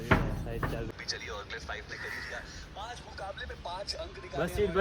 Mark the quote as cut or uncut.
cut